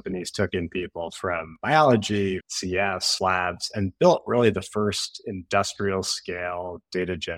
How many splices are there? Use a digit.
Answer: 1